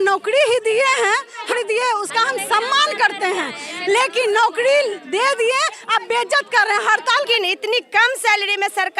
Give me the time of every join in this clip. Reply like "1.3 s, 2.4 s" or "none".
1.5 s, 7.3 s

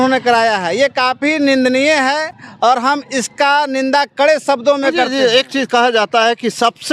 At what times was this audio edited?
none

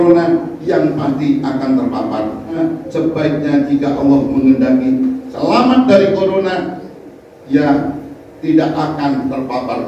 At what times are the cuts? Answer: 2.6 s

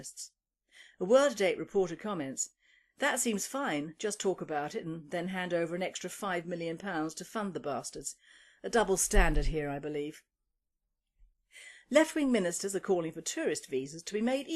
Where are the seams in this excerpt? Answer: 11.1 s

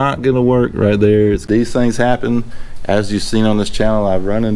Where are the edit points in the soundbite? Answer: 1.4 s

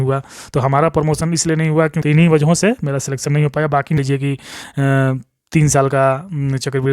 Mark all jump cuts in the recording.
1.9 s, 4.0 s

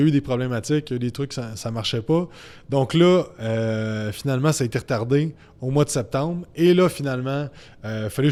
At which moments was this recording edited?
none

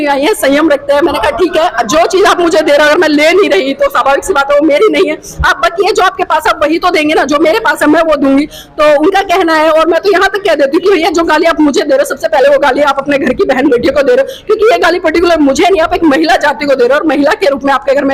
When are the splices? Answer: none

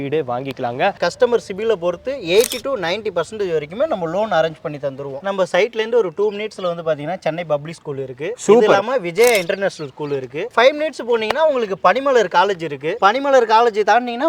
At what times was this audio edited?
1.0 s, 5.2 s

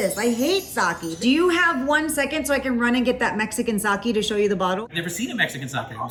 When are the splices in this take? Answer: none

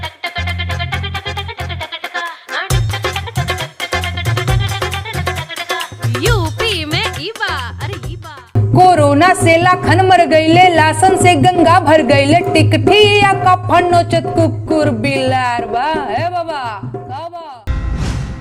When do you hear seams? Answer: 17.5 s

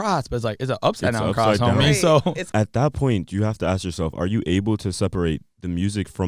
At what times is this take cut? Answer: 2.4 s

